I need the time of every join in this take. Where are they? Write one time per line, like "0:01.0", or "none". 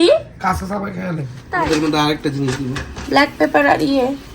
0:01.3